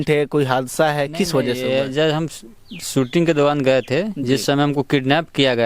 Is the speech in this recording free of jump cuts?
yes; 0 cuts

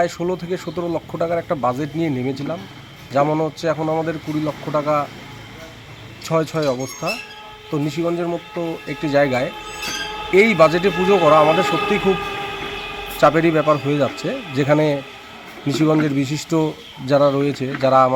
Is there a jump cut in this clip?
no; 0 cuts

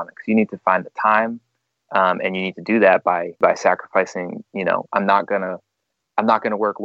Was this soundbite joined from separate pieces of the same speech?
yes; 1 cut; at 3.4 s

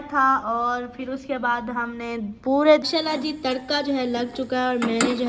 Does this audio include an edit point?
yes; 1 cut; at 2.8 s

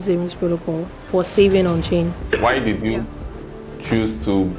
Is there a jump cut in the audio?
yes; 2 cuts; at 0.9 s, 2.2 s

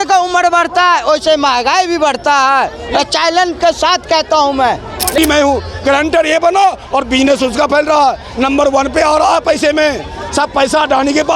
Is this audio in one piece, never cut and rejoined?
no; 1 cut; at 5.2 s

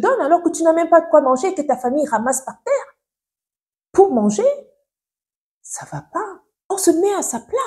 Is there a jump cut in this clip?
yes; 1 cut; at 6.7 s

